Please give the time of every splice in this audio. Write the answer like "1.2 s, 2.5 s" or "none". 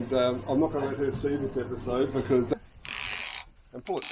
2.5 s